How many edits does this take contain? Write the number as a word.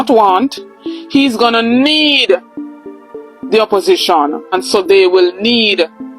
one